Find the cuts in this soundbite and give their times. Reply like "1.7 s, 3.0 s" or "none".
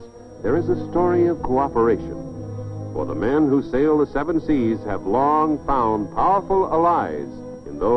7.1 s